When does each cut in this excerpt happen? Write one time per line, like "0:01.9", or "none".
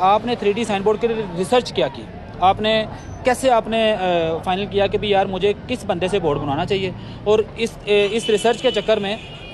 none